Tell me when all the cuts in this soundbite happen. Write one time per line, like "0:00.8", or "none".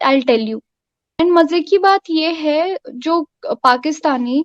0:01.0